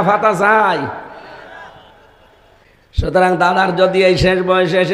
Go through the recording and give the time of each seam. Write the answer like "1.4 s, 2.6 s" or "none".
2.7 s